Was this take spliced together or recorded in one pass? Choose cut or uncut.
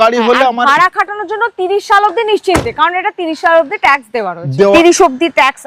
cut